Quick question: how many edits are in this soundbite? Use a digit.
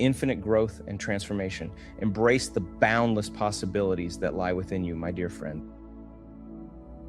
1